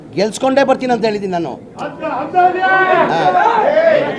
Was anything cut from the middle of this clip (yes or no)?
no